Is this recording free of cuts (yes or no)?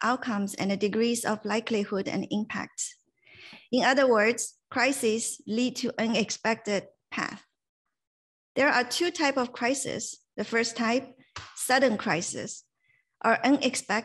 yes